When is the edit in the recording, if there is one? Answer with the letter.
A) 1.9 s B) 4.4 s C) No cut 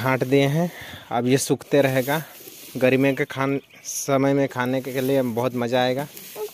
C